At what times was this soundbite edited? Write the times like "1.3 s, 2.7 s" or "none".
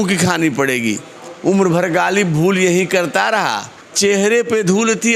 none

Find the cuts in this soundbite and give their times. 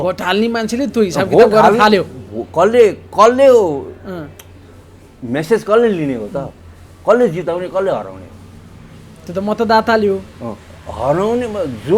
none

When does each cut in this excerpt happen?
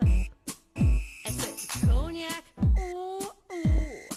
none

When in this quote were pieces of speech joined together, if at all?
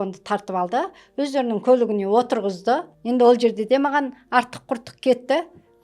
2.9 s

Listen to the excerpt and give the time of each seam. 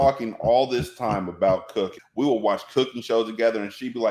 2.0 s

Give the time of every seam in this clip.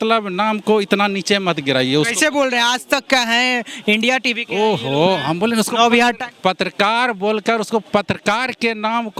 none

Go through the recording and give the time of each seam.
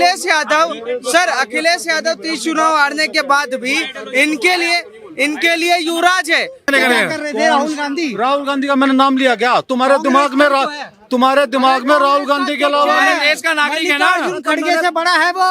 6.7 s

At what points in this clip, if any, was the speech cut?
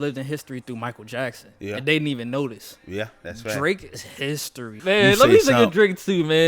4.8 s

